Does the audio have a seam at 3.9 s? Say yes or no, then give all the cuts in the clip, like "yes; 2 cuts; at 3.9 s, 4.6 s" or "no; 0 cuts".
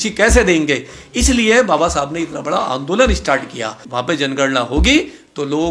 yes; 1 cut; at 3.9 s